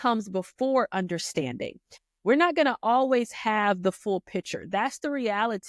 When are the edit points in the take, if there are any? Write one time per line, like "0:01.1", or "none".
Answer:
none